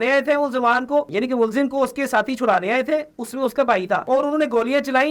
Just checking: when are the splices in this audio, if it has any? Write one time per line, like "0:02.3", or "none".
none